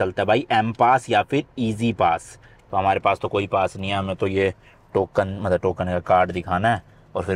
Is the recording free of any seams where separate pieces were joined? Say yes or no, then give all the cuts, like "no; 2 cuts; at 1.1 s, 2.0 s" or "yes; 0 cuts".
yes; 0 cuts